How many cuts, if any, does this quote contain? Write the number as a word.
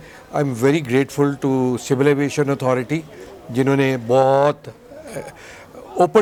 zero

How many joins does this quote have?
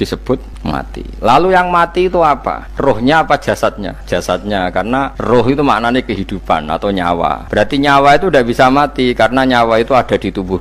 four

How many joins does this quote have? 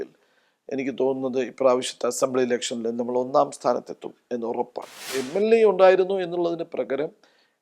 one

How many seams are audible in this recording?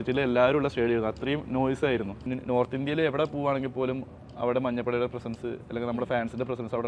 one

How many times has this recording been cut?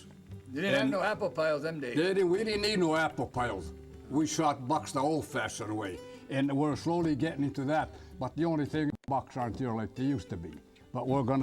one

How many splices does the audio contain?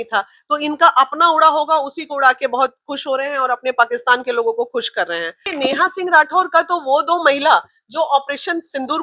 one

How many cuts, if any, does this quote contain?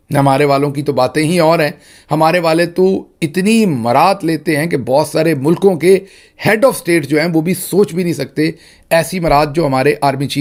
zero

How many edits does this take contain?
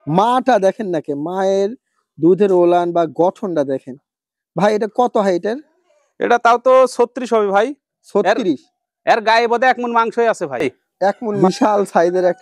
one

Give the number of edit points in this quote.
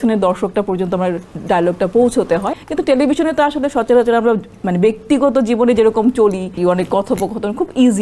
two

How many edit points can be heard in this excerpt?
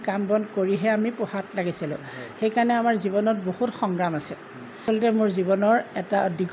one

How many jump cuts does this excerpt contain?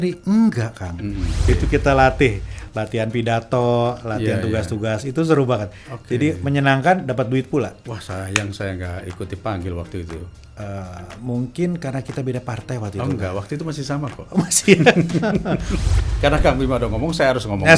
two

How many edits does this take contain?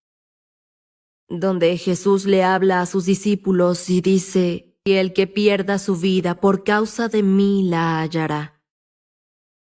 one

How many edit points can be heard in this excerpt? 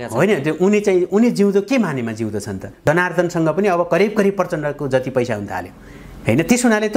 one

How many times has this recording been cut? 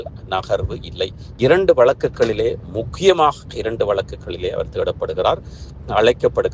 one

